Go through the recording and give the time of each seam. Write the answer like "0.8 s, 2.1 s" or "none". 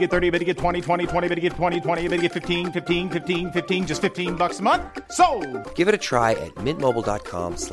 none